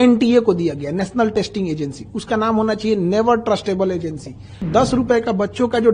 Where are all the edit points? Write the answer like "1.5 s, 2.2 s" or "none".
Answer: 4.6 s